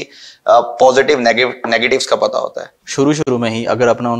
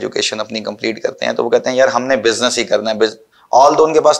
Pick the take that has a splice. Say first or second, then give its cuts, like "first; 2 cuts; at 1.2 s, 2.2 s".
first; 1 cut; at 3.3 s